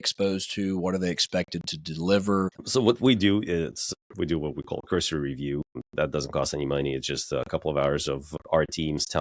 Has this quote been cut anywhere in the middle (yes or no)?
yes